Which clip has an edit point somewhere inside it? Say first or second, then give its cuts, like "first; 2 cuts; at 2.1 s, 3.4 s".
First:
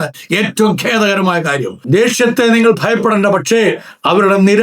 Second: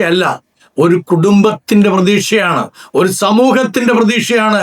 first; 1 cut; at 1.8 s